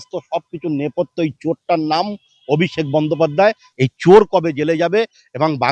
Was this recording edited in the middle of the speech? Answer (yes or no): yes